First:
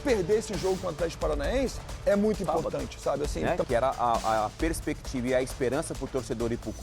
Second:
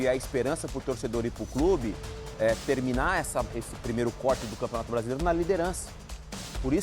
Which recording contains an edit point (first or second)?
first